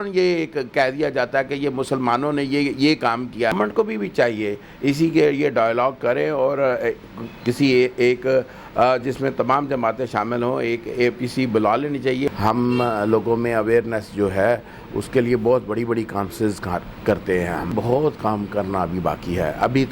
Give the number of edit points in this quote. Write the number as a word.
three